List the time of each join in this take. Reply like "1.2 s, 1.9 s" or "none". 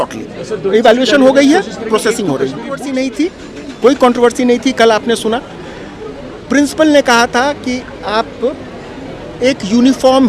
2.9 s